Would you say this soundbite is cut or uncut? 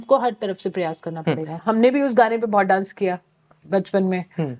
cut